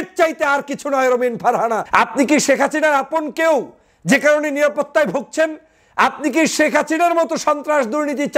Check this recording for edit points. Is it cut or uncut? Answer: cut